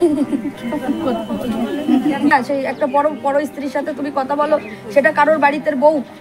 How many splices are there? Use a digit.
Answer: 1